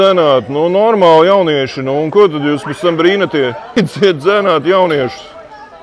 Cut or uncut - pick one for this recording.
cut